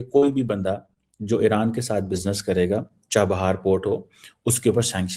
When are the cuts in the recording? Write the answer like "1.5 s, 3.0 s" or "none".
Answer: none